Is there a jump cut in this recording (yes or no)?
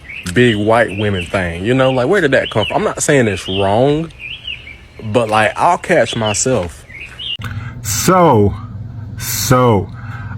yes